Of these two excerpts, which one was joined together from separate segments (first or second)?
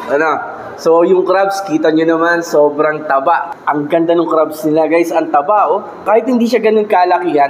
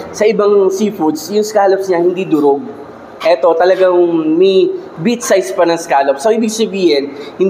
first